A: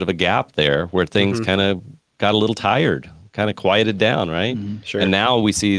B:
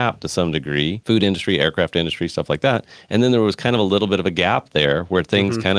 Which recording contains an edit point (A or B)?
B